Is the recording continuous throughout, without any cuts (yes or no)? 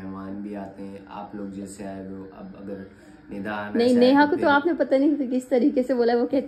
yes